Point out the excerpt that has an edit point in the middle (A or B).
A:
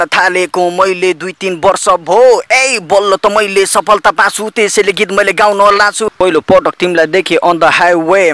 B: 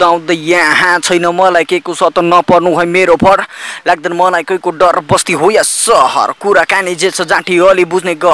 A